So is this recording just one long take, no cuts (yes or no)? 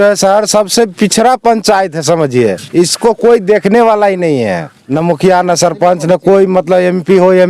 no